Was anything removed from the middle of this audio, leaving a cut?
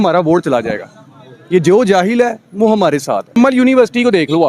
yes; 1 cut; at 3.4 s

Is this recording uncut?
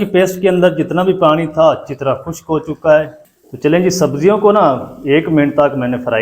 no; 1 cut; at 3.2 s

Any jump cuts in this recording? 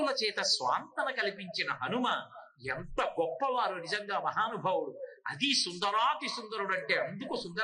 no; 0 cuts

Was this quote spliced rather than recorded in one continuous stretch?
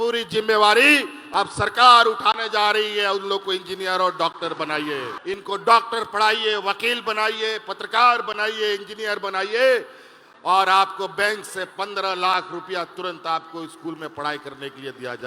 yes; 1 cut; at 5.1 s

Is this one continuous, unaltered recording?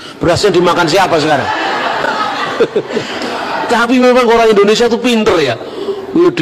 no; 1 cut; at 2.0 s

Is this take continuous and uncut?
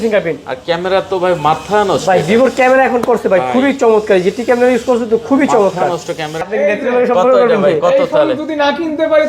no; 1 cut; at 6.5 s

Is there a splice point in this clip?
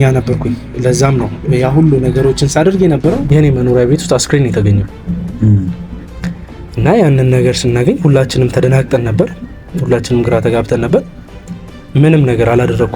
yes; 1 cut; at 3.2 s

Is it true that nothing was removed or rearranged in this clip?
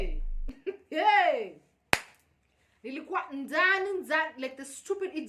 yes; 0 cuts

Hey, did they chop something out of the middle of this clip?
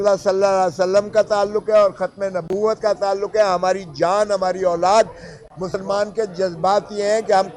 no; 0 cuts

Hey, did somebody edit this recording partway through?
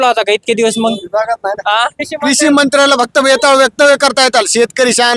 yes; 1 cut; at 2.1 s

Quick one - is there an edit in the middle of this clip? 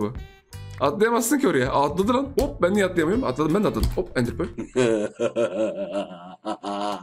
no; 0 cuts

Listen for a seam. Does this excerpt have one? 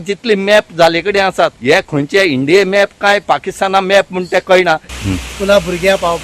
yes; 2 cuts; at 1.8 s, 4.9 s

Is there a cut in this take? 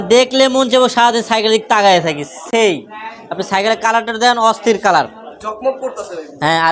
no; 0 cuts

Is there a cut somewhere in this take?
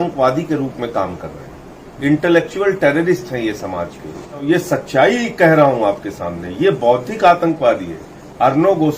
yes; 1 cut; at 4.7 s

